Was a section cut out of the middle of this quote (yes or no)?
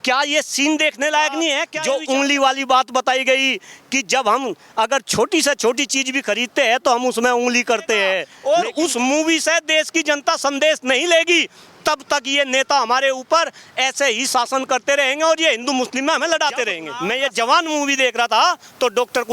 yes